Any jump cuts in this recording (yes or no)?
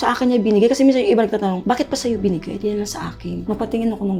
no